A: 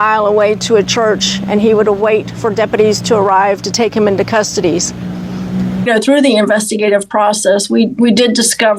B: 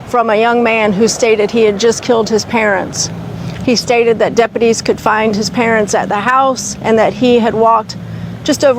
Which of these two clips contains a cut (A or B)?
A